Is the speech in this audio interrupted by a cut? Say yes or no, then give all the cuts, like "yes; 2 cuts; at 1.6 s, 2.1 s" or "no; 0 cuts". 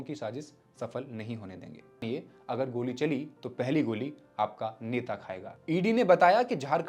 yes; 2 cuts; at 2.0 s, 5.6 s